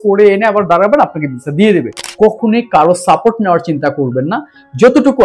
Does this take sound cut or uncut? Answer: cut